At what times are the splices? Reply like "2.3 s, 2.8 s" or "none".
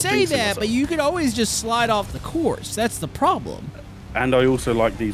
none